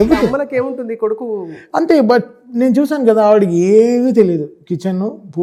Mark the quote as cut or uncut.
uncut